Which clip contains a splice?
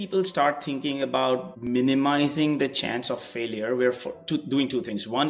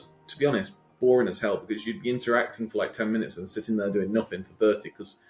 first; 1 cut; at 1.5 s

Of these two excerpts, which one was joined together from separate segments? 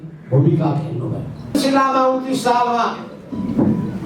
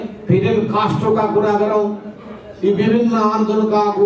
first; 1 cut; at 1.5 s

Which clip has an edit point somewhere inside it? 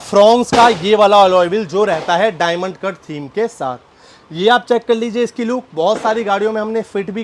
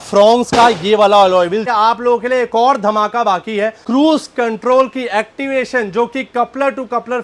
second; 2 cuts; at 1.7 s, 3.8 s

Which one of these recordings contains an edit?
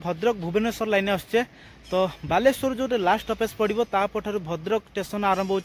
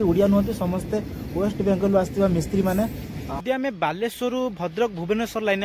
second; 1 cut; at 3.3 s

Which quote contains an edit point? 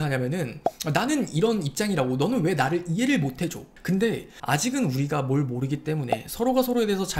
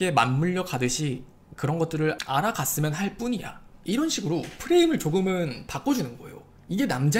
first; 2 cuts; at 3.7 s, 4.4 s

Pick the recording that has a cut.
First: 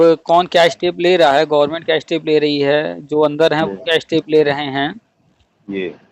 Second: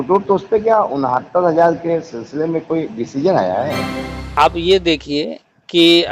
second; 1 cut; at 4.3 s

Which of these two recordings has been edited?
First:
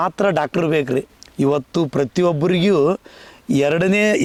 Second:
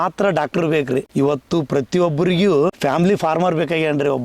second; 2 cuts; at 1.1 s, 2.8 s

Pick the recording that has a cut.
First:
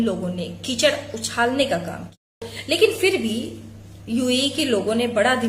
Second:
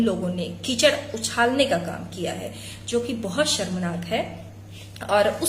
first; 1 cut; at 2.5 s

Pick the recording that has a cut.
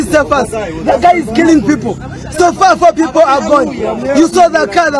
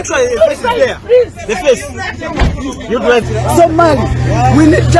second; 1 cut; at 3.3 s

